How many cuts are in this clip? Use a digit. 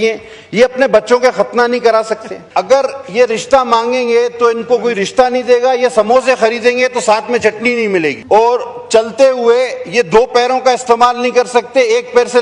2